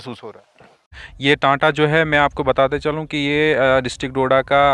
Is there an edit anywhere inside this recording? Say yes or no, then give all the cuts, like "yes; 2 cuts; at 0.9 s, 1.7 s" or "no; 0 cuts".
yes; 1 cut; at 0.9 s